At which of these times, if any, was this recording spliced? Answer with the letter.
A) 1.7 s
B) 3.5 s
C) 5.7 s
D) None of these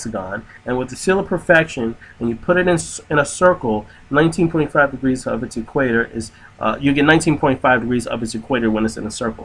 C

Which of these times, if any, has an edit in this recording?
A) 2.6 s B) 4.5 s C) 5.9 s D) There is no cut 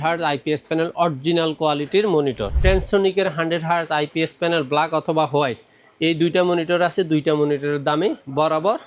A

